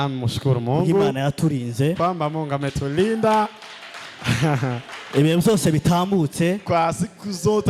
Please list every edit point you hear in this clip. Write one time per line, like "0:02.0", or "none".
none